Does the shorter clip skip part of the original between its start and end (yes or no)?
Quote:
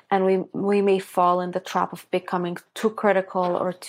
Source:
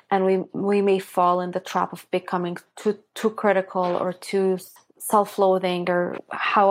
yes